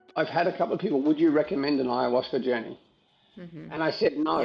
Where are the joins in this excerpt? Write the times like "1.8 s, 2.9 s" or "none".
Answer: none

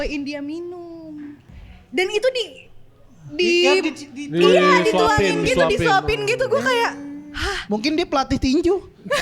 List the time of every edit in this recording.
1.4 s

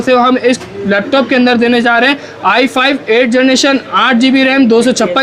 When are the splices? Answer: none

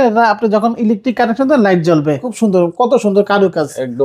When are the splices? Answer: 2.3 s

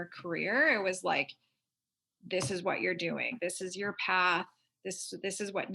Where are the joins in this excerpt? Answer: 3.3 s

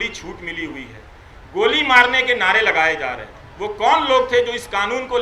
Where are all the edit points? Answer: none

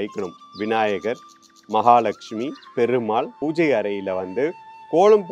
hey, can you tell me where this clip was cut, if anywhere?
3.3 s

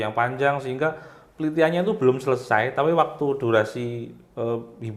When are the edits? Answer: none

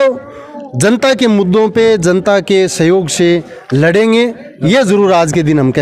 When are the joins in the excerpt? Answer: none

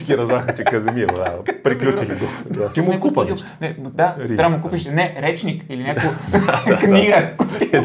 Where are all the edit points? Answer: 2.7 s

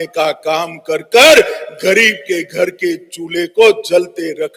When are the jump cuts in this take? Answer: none

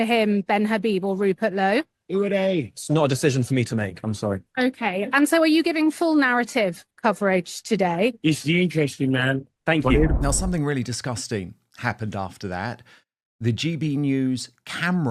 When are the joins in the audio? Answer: 10.2 s

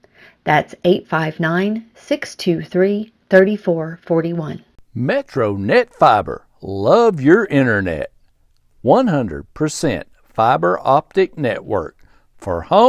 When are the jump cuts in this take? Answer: 4.7 s

